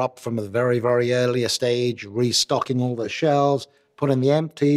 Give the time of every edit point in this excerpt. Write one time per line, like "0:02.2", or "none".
0:03.1